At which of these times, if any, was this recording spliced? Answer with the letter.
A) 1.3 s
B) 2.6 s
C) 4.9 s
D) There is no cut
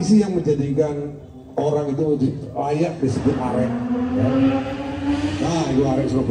D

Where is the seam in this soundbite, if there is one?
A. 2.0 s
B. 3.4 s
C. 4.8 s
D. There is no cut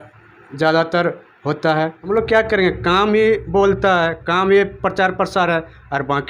A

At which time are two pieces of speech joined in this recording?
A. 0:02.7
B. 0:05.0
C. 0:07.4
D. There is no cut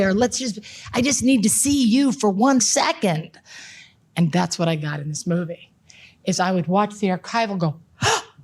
A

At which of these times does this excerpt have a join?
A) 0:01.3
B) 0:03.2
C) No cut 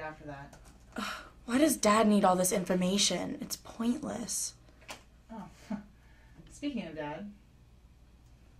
A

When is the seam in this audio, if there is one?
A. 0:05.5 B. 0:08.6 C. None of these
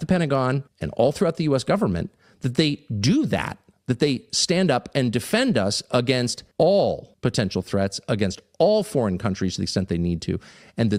C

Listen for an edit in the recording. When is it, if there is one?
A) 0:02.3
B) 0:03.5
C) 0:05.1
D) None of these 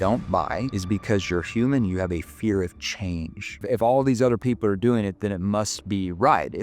B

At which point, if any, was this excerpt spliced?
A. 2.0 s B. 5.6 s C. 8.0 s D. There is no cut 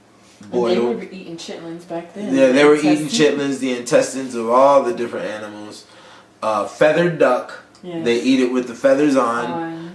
B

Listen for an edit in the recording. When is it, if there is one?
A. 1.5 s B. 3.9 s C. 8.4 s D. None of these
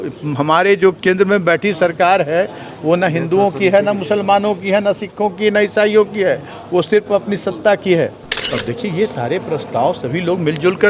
C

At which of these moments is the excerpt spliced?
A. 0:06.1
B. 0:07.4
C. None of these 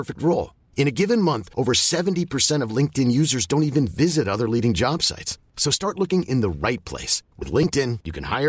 C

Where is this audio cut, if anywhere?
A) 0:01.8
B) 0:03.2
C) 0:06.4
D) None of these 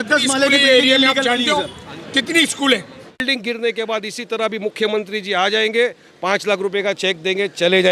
B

